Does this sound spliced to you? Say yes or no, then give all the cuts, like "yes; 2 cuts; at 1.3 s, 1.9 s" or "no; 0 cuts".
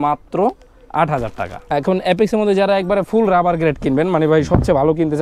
yes; 1 cut; at 1.6 s